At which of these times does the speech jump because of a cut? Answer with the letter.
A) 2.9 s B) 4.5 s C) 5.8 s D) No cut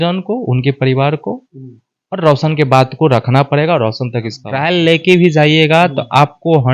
B